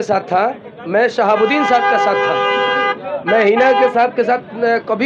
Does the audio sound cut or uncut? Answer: uncut